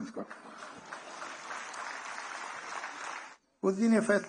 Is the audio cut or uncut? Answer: cut